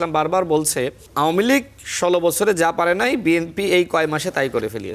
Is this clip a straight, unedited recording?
no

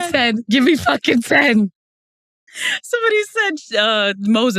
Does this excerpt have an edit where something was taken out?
no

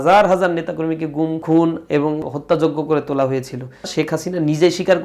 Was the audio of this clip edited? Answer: yes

